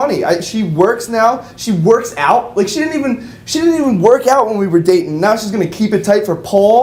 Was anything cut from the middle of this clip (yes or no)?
no